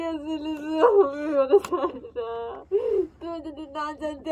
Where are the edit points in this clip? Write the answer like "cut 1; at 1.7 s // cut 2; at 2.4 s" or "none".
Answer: cut 1; at 2.6 s